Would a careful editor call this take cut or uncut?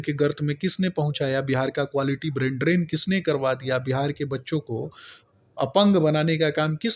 uncut